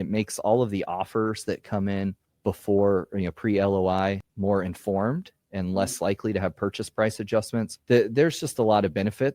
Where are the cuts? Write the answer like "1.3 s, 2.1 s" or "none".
2.3 s, 4.3 s, 7.7 s